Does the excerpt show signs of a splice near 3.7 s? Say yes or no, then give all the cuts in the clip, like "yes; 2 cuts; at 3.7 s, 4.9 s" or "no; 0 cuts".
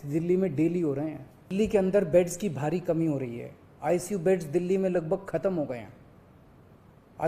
no; 1 cut; at 1.4 s